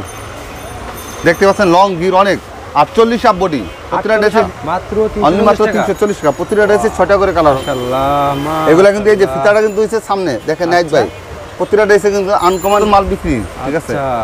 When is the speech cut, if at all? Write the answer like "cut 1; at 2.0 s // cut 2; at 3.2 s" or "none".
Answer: cut 1; at 4.5 s // cut 2; at 7.6 s // cut 3; at 12.8 s